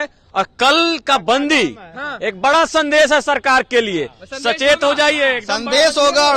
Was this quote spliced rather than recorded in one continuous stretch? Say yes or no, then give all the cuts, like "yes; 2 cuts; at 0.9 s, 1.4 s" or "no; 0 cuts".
no; 0 cuts